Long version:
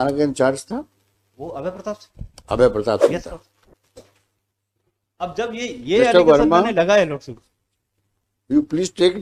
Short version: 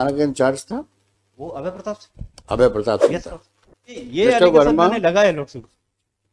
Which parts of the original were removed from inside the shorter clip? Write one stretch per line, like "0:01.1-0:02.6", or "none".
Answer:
0:03.9-0:05.7